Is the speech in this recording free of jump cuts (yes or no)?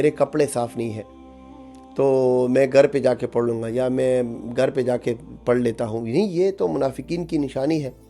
yes